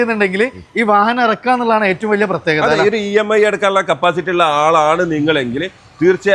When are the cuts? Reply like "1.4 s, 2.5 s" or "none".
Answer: none